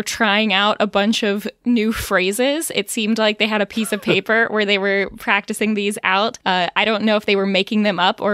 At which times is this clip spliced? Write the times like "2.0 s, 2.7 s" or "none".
6.4 s